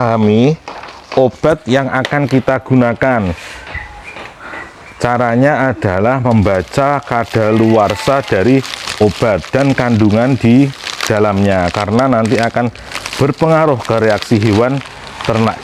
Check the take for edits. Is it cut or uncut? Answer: uncut